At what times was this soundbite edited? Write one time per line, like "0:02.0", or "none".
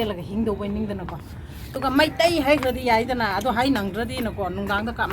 0:01.7

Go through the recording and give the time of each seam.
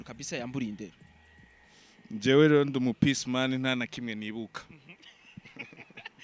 none

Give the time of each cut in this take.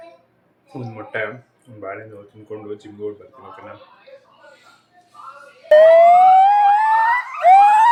none

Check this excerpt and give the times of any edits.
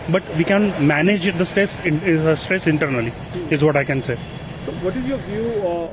none

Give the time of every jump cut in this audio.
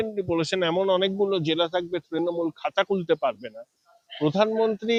none

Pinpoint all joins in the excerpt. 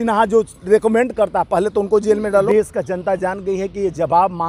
0:02.5

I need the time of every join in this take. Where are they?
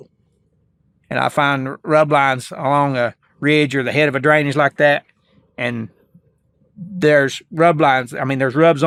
none

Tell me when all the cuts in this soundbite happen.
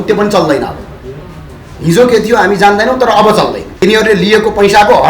0:03.7

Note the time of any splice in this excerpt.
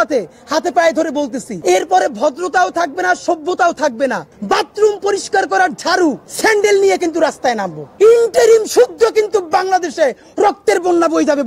0:01.5
0:04.3
0:06.3
0:07.8

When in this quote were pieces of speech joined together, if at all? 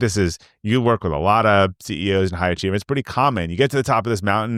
none

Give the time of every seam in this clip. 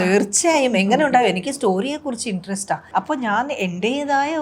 0:02.8

